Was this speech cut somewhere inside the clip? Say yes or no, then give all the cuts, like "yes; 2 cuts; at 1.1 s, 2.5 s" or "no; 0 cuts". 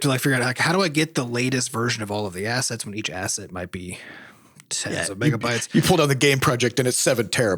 no; 0 cuts